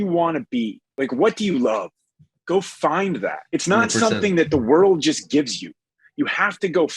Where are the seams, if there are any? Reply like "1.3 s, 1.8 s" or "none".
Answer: 0.9 s, 3.4 s